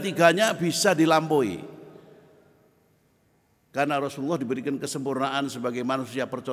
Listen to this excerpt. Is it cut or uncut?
uncut